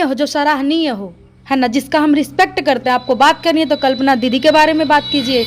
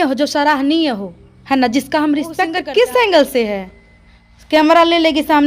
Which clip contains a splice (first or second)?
second